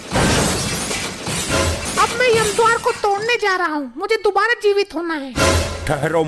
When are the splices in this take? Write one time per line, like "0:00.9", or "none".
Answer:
0:01.8